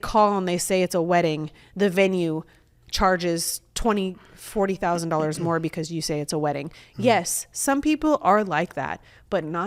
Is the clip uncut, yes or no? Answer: yes